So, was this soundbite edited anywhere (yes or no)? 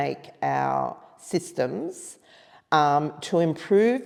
no